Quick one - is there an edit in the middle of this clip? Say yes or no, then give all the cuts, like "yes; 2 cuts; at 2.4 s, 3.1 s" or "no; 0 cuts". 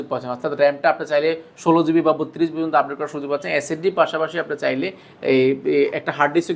no; 0 cuts